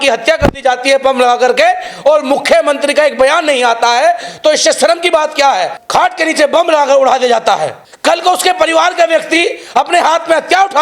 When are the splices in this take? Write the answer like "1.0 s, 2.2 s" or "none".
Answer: 5.8 s, 7.8 s